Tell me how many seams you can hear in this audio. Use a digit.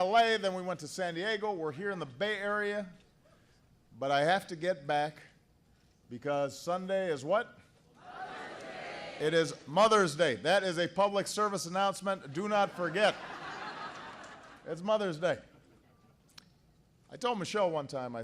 1